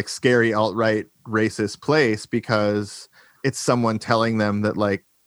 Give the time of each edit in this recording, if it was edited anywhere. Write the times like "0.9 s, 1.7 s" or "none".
none